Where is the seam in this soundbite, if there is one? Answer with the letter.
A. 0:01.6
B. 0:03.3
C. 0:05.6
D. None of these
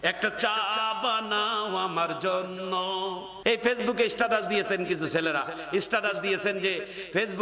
B